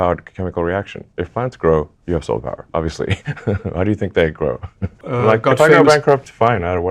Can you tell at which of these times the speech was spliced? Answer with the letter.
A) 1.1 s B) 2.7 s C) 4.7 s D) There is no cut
C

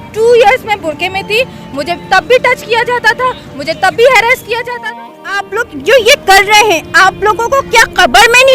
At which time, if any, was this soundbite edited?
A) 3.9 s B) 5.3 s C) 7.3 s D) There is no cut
B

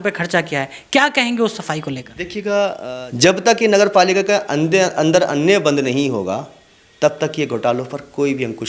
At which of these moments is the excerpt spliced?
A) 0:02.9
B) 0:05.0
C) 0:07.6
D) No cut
A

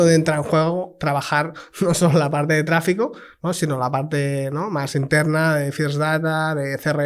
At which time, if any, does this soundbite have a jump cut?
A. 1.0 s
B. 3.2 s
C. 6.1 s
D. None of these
D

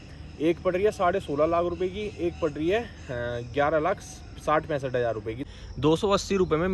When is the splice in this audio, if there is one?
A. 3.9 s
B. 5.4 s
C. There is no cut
B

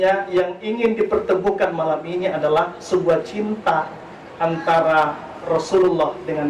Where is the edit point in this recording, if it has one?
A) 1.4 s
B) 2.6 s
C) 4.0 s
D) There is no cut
D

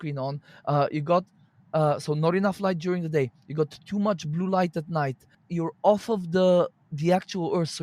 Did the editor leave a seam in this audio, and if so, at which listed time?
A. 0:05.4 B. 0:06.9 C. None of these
A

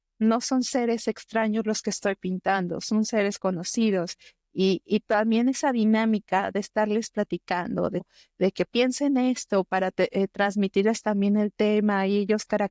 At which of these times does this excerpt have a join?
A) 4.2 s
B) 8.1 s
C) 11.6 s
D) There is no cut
B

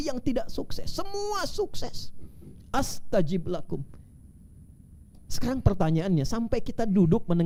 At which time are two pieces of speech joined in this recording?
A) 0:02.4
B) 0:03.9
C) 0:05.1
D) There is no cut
D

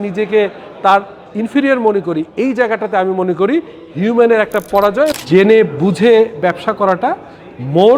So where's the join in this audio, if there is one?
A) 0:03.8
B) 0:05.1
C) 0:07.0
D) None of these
B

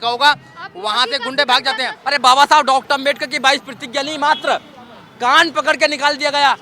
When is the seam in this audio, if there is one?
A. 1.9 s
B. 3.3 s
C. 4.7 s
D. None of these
A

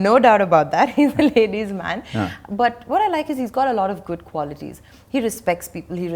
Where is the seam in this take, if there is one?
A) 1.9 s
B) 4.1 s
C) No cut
C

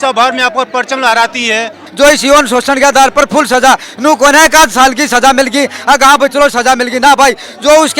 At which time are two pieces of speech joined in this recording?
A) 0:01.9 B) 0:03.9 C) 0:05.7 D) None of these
A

